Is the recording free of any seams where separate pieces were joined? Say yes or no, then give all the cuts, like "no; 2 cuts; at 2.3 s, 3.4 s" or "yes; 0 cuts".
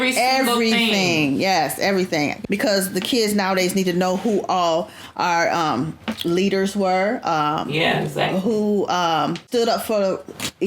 no; 2 cuts; at 2.4 s, 9.4 s